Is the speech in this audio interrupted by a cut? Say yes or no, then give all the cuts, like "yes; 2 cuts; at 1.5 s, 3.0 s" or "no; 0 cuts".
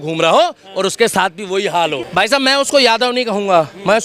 yes; 1 cut; at 2.1 s